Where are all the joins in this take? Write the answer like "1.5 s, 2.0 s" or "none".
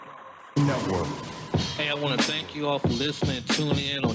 1.3 s